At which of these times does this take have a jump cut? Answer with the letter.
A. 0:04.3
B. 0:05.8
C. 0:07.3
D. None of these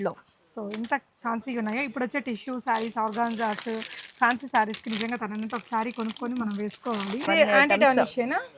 C